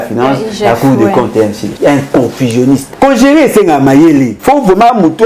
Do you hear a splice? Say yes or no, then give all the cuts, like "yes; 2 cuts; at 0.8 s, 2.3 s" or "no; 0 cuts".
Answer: yes; 3 cuts; at 1.7 s, 2.9 s, 4.3 s